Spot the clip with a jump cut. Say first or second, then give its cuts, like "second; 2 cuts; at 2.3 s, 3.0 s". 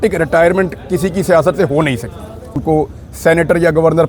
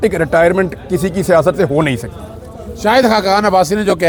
first; 1 cut; at 2.6 s